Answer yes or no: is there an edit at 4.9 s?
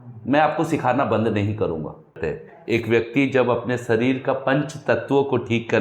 no